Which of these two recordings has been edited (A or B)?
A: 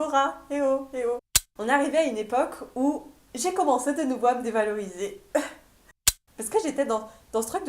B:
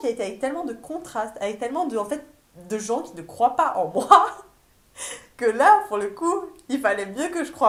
A